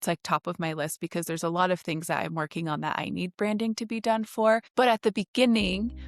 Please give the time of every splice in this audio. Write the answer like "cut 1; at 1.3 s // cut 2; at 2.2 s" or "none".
cut 1; at 4.7 s